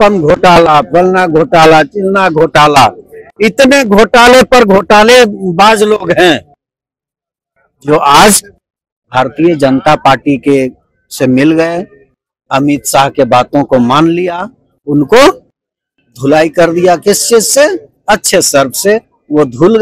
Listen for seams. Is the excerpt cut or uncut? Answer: uncut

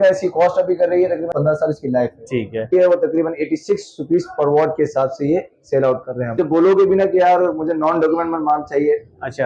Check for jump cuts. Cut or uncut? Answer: cut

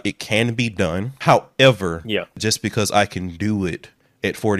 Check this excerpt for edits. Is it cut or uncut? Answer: cut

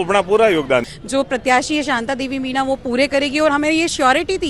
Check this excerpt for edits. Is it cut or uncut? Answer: cut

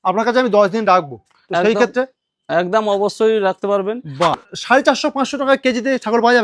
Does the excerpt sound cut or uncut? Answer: cut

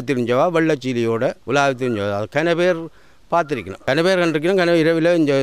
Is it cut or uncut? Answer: cut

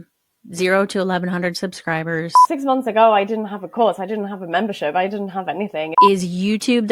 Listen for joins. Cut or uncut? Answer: cut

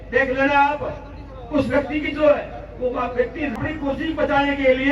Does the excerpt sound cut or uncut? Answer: cut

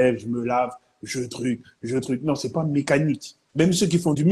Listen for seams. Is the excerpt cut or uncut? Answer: cut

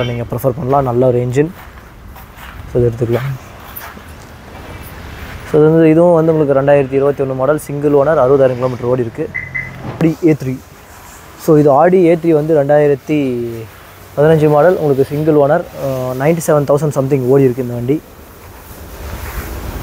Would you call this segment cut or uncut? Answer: cut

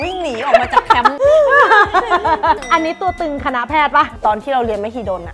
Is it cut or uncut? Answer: cut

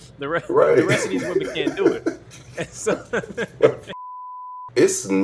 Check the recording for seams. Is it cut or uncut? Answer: cut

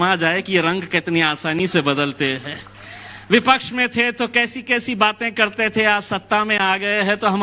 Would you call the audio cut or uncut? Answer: uncut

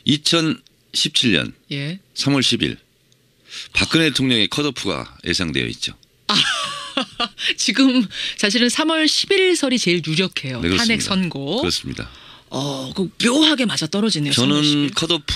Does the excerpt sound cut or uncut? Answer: uncut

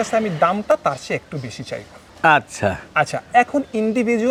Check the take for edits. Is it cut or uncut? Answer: uncut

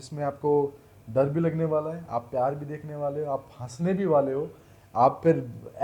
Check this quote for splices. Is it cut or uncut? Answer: uncut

